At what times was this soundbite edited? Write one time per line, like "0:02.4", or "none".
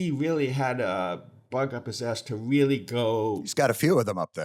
0:03.4